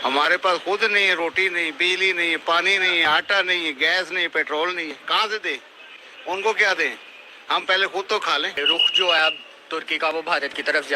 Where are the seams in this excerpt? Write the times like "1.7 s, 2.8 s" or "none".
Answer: 8.6 s